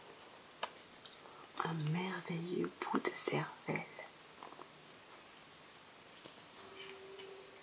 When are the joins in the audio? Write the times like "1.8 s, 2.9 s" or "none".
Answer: 6.6 s